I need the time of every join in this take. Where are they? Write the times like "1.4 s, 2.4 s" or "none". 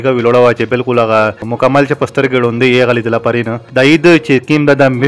1.5 s, 3.6 s